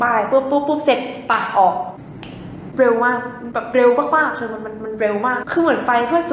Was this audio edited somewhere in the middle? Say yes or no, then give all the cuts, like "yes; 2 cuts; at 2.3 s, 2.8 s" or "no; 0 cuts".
yes; 2 cuts; at 2.6 s, 5.4 s